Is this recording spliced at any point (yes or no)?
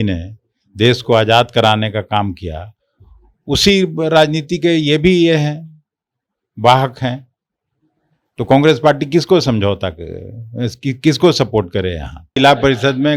yes